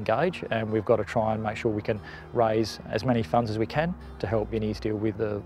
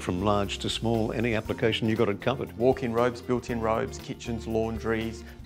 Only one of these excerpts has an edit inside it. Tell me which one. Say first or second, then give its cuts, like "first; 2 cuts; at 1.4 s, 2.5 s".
second; 1 cut; at 2.5 s